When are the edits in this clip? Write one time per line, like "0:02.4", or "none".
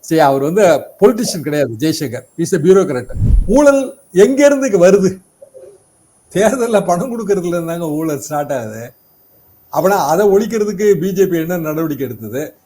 0:03.2